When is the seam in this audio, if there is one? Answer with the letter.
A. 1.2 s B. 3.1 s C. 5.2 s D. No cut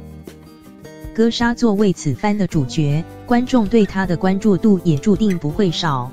A